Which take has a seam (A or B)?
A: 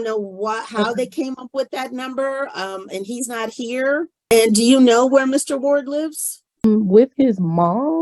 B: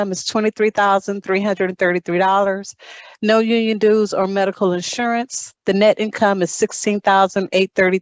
A